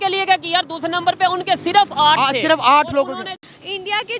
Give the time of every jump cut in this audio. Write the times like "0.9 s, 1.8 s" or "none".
3.2 s